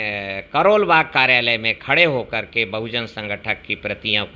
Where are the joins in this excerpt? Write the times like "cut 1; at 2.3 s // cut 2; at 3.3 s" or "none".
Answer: none